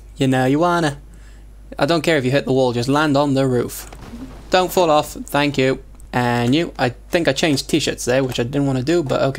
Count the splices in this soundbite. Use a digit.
1